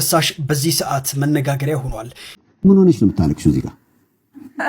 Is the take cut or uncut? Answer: cut